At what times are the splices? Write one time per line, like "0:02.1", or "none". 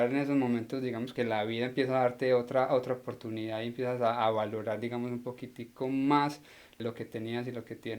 0:01.1
0:06.8

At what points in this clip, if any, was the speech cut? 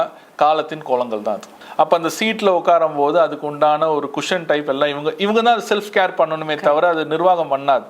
0:01.6

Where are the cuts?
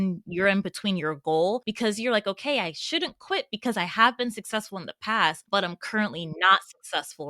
0:01.7
0:05.4

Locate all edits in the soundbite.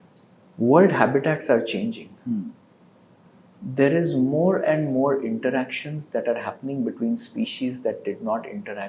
none

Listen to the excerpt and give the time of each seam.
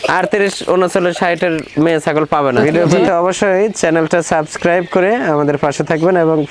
0:02.6

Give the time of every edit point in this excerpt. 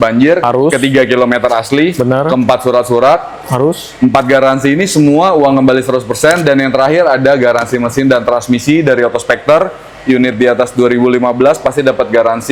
none

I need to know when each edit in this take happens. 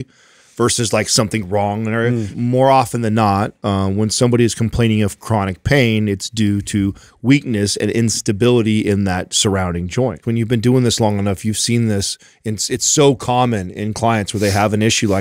0:02.3
0:10.2

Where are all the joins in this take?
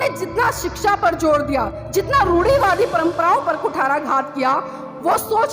0:01.8

